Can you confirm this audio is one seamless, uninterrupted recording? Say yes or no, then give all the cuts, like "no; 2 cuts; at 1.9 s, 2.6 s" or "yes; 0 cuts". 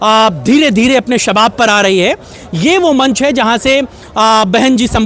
yes; 0 cuts